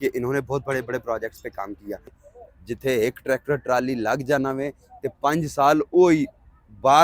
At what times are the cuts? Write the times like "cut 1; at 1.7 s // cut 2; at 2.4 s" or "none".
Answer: cut 1; at 2.2 s